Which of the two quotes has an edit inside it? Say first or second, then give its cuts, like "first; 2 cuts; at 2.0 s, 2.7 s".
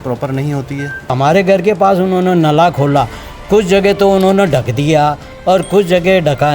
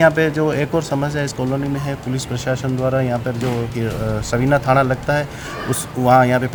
first; 1 cut; at 1.1 s